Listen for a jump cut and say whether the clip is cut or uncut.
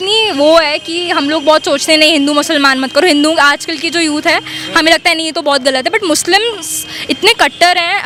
uncut